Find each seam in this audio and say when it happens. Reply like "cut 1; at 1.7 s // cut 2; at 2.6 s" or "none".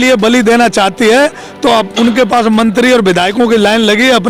none